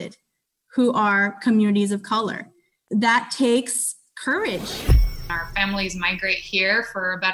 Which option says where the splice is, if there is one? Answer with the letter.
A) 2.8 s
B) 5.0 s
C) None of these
B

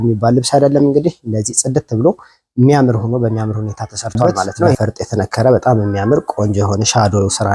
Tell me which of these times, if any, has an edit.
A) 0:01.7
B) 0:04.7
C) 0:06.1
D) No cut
B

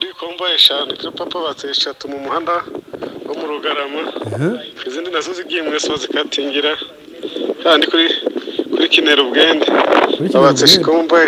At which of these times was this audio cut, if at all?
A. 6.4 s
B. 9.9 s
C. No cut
C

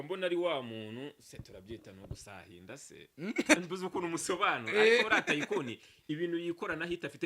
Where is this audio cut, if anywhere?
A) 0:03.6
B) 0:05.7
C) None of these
A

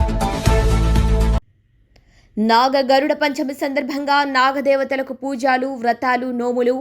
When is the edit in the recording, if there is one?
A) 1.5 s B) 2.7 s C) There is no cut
C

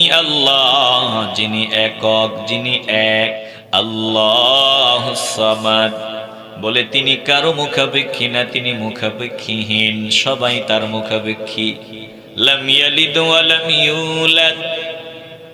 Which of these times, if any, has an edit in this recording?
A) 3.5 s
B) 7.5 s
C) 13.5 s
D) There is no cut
A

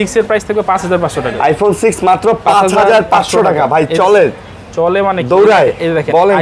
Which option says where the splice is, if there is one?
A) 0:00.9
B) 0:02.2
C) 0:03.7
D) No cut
D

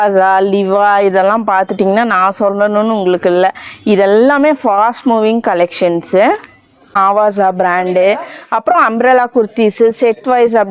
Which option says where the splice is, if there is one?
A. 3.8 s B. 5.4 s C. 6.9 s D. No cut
C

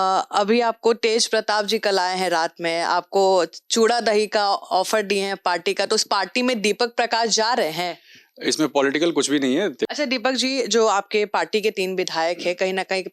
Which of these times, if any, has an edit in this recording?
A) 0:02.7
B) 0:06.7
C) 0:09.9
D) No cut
C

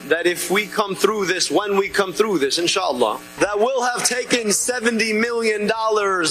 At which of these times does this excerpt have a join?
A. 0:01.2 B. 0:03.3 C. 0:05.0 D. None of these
B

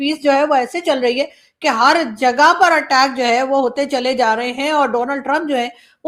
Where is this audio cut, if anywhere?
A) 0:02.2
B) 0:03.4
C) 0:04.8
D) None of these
D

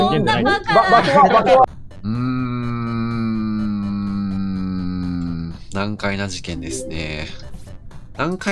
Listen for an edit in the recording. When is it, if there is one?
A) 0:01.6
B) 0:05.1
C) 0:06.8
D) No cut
A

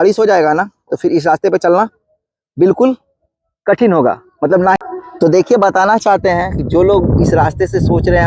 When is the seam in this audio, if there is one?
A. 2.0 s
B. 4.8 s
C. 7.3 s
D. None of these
B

